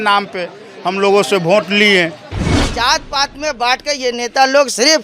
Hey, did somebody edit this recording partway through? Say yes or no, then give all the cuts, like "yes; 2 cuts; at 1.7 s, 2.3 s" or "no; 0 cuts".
yes; 1 cut; at 2.5 s